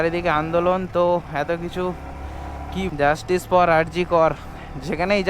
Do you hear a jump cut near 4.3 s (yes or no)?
no